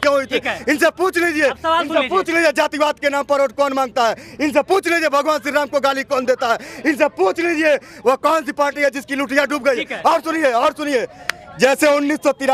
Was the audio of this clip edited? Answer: no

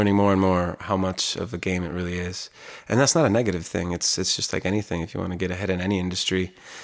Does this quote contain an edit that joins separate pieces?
no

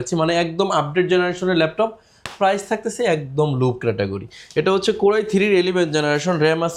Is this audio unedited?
yes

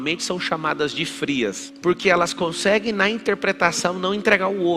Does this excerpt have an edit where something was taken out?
yes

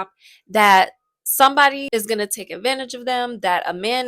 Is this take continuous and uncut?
no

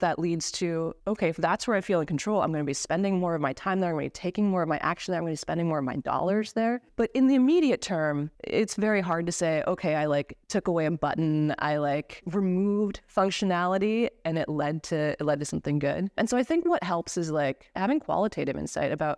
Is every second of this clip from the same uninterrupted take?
no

